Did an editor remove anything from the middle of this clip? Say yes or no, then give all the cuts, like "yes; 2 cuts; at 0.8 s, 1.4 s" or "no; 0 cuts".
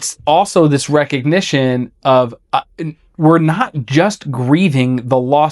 no; 0 cuts